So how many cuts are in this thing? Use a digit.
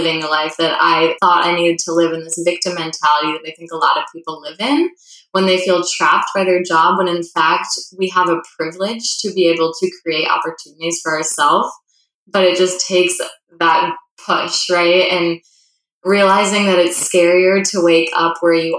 1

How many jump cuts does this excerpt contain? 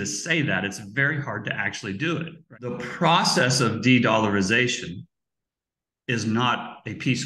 1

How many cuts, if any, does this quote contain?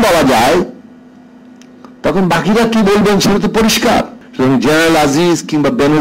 1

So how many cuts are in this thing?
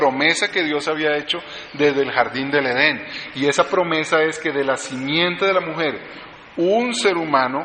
1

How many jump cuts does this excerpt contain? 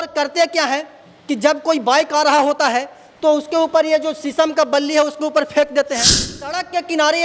1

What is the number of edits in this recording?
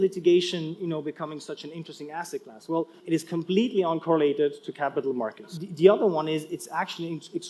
2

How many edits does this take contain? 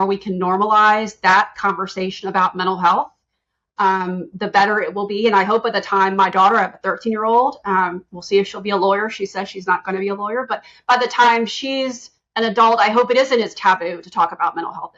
0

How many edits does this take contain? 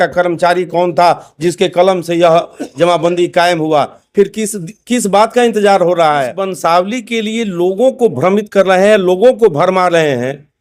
1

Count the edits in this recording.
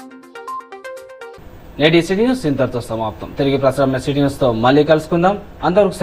0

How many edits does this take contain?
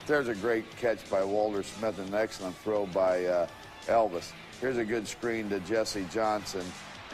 0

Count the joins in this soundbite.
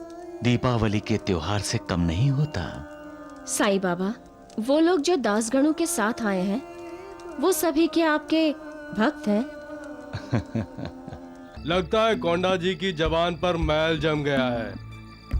1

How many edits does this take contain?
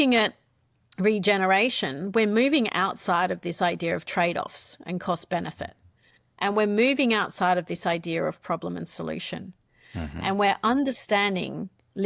0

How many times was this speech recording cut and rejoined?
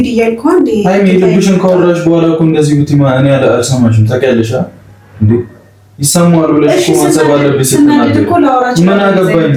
0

